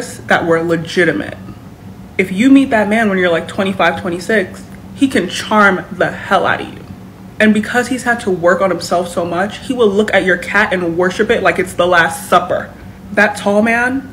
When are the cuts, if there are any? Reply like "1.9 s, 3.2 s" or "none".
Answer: none